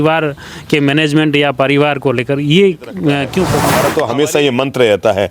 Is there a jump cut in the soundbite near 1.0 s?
no; 1 cut; at 3.6 s

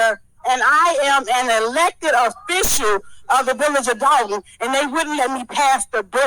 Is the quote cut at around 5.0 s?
no; 0 cuts

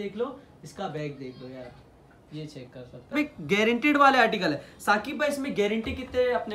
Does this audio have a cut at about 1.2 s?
no; 1 cut; at 3.1 s

